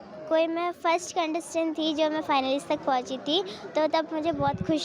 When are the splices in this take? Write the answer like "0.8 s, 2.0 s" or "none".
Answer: none